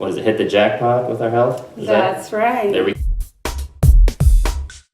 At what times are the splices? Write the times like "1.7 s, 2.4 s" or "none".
2.9 s